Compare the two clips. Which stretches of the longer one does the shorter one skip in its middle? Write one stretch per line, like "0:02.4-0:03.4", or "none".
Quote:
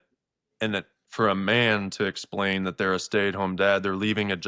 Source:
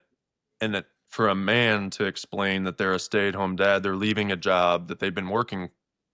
none

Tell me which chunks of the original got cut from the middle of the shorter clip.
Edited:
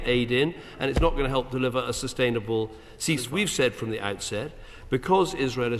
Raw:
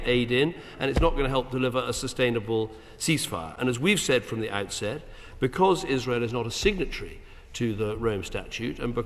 0:03.3-0:03.8

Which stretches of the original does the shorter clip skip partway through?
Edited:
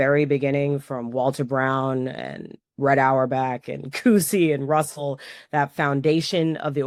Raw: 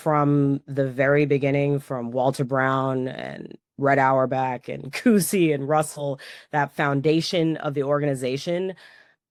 none

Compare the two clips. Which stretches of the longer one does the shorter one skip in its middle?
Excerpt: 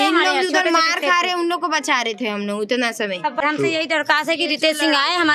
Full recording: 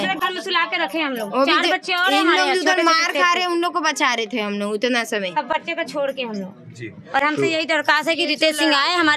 0:05.5-0:07.2

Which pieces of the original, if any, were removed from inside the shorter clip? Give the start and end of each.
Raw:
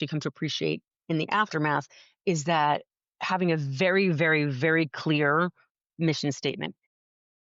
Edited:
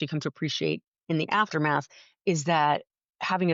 none

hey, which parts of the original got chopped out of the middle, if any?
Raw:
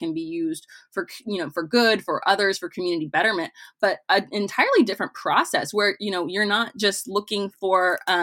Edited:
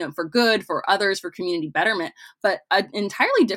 none

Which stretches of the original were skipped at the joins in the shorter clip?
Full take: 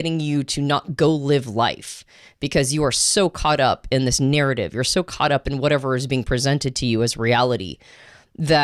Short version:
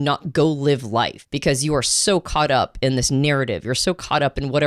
0:01.9-0:02.3

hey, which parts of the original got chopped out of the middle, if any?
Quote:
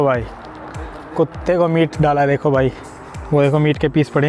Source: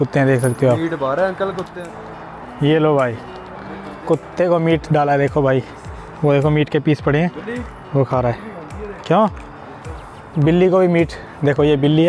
none

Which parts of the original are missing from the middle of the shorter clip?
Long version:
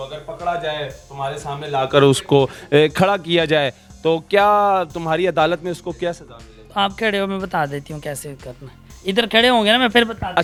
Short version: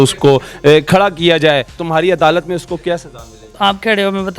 0:03.9-0:04.9

